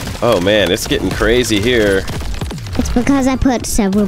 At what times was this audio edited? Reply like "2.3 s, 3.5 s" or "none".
none